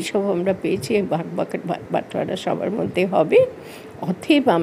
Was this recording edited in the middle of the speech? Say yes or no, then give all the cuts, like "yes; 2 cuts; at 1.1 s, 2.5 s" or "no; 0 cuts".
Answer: no; 0 cuts